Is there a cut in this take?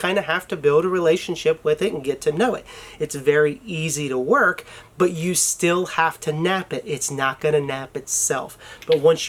no; 0 cuts

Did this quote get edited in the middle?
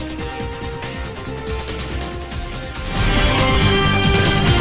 yes; 2 cuts; at 2.2 s, 3.6 s

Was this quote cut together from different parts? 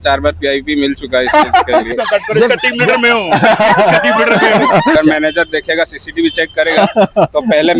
yes; 2 cuts; at 1.9 s, 4.9 s

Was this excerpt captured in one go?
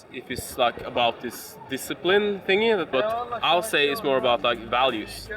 no; 1 cut; at 2.9 s

